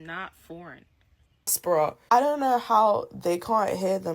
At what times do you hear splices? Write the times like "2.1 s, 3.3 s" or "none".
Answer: 1.6 s